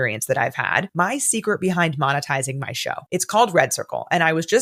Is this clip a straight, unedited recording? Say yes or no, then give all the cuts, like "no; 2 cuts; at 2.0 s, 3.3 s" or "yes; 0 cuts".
yes; 0 cuts